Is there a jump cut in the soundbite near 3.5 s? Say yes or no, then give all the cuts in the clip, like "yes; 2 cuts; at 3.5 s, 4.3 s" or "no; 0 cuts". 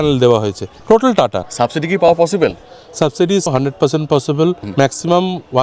yes; 3 cuts; at 1.2 s, 3.5 s, 4.6 s